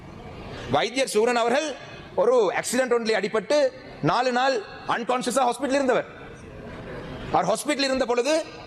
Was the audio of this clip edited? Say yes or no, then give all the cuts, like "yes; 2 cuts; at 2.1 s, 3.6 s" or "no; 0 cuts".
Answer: no; 0 cuts